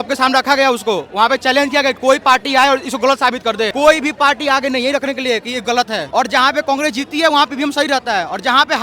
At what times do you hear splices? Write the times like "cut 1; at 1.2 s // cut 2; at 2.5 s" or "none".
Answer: cut 1; at 3.7 s // cut 2; at 6.0 s